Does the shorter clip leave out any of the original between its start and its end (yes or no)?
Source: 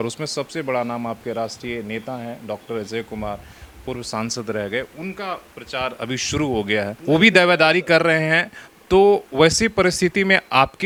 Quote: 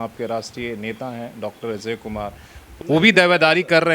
yes